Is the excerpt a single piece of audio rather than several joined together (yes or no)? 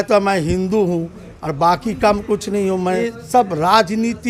no